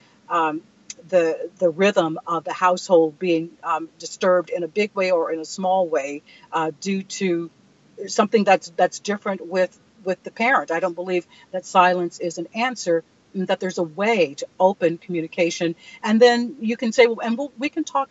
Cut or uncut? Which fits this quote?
uncut